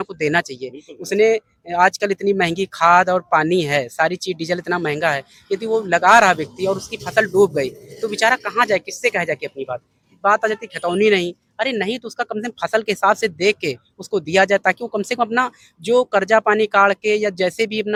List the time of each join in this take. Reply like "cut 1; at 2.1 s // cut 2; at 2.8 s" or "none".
none